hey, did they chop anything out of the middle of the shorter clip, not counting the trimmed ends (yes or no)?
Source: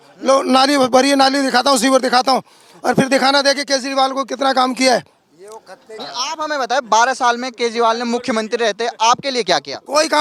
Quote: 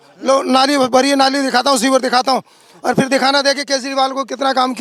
no